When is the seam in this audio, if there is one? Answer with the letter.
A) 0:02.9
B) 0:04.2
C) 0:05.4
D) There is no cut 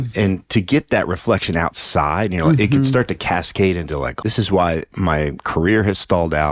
B